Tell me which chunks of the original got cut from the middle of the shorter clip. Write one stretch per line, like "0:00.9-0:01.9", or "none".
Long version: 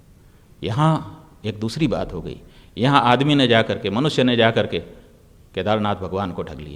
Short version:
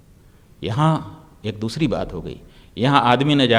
none